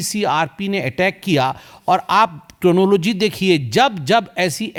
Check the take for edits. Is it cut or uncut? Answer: uncut